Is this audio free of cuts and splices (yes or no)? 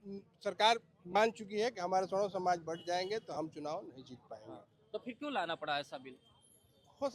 yes